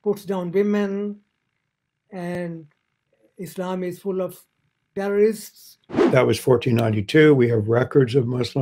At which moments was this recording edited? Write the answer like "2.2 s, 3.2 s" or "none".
6.0 s